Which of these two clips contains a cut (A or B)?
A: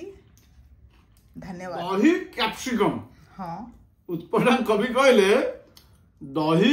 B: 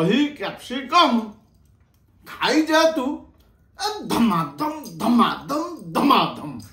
A